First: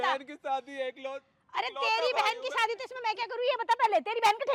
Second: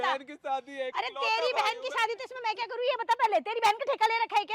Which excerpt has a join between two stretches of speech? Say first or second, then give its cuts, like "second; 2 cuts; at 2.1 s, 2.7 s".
second; 1 cut; at 0.9 s